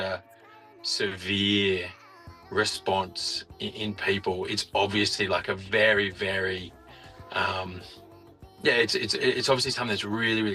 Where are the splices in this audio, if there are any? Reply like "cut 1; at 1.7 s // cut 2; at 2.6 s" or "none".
none

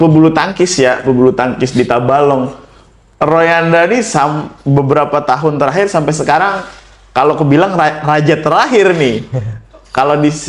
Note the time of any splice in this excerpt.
none

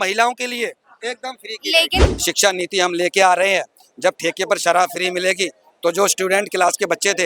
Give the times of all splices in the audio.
cut 1; at 2.0 s

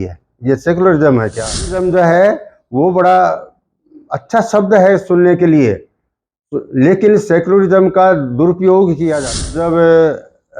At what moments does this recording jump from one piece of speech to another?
cut 1; at 1.7 s // cut 2; at 9.4 s

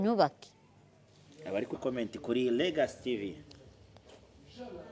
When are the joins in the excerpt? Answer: cut 1; at 1.8 s

